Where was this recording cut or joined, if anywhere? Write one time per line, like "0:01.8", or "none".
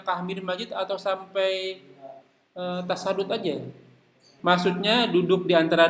0:04.2